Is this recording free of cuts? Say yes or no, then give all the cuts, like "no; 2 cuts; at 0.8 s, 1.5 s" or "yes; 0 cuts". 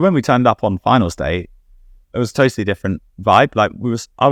yes; 0 cuts